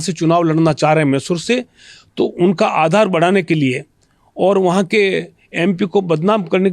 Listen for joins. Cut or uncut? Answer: uncut